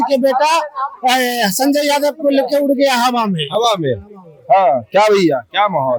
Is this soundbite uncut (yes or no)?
yes